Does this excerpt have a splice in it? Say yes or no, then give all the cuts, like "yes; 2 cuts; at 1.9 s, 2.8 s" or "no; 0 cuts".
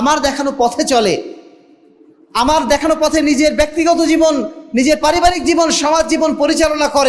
no; 0 cuts